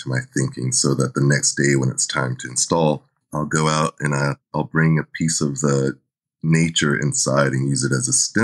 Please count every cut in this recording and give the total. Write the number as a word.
one